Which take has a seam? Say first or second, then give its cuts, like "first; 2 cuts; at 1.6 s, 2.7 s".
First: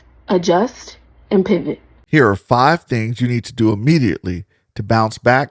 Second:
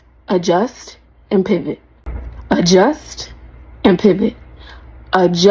first; 1 cut; at 2.0 s